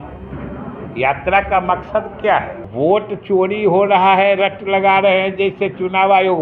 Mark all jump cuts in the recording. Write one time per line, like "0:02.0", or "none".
0:02.6